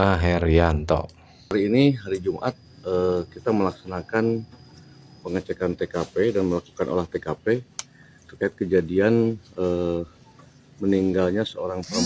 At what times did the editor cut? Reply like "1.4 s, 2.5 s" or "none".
none